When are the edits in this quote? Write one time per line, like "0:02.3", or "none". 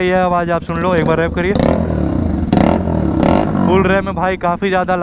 none

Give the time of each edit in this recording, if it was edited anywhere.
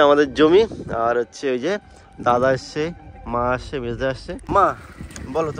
0:04.4

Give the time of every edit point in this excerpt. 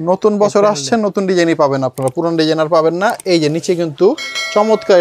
none

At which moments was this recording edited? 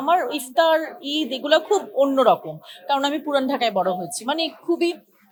none

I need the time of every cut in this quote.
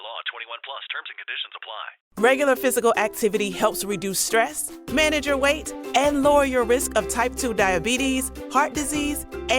0:02.0

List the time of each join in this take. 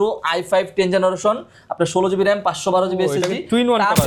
none

